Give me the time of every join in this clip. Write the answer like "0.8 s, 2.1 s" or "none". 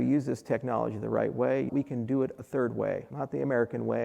1.7 s, 3.1 s